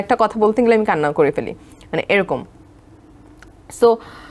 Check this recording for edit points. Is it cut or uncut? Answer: uncut